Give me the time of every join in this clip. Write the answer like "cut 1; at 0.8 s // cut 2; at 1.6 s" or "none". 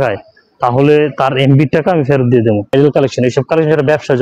cut 1; at 2.7 s